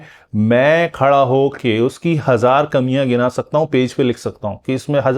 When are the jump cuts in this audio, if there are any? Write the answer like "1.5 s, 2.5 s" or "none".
none

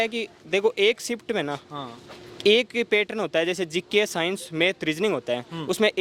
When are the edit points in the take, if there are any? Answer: none

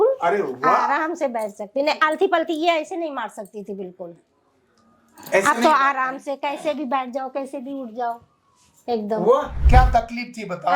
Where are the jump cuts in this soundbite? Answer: 9.6 s

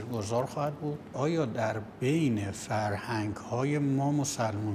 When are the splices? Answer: 1.1 s

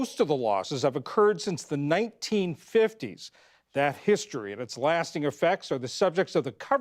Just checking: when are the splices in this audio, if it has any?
1.3 s

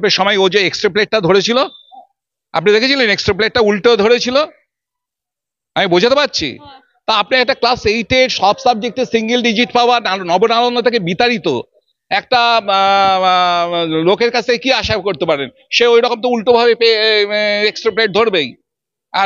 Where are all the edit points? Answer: none

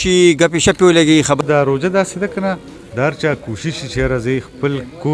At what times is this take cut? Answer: 1.4 s

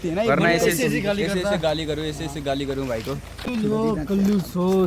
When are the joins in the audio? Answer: 3.4 s

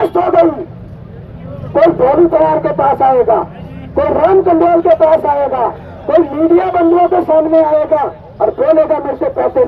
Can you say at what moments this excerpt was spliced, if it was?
none

